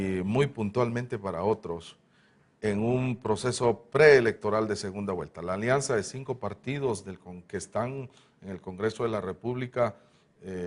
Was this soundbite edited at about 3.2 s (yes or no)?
no